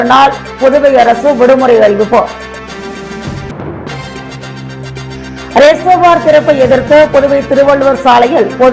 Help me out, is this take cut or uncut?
uncut